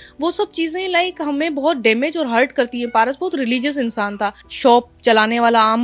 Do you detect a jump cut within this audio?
yes; 1 cut; at 4.4 s

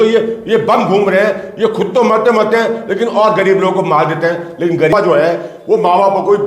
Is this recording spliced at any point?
yes; 1 cut; at 4.9 s

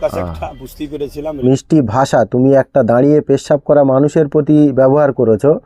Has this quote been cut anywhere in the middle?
yes; 1 cut; at 1.2 s

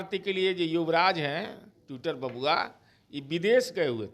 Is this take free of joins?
yes; 0 cuts

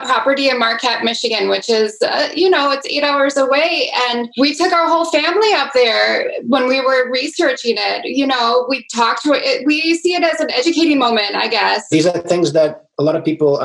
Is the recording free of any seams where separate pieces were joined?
no; 4 cuts; at 1.3 s, 4.3 s, 10.6 s, 11.9 s

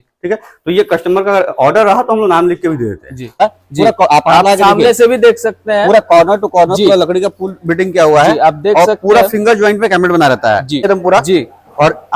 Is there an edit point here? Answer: yes; 2 cuts; at 3.4 s, 10.8 s

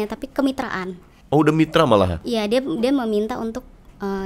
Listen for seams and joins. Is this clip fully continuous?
yes; 0 cuts

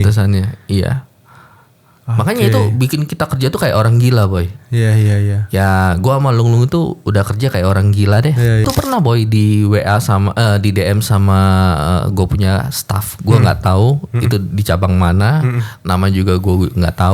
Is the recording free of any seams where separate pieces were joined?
no; 1 cut; at 8.6 s

